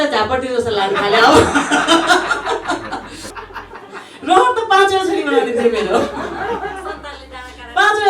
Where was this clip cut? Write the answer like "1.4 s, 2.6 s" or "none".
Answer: 3.3 s